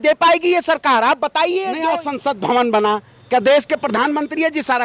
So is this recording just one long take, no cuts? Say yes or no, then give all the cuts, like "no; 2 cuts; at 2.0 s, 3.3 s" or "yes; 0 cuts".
no; 1 cut; at 1.8 s